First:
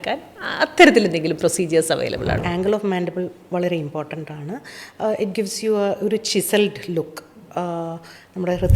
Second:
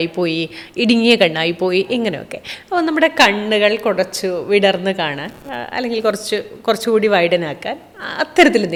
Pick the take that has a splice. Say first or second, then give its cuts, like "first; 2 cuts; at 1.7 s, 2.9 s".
first; 1 cut; at 2.4 s